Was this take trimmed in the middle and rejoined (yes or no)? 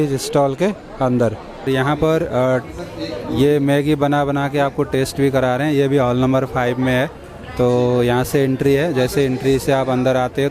yes